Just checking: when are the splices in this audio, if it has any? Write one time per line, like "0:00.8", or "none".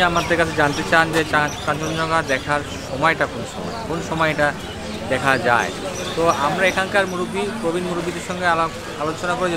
none